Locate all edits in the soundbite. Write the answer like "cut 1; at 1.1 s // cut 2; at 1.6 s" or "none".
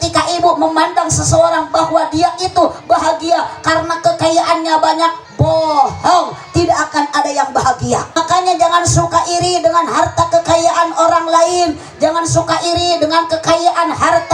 cut 1; at 8.1 s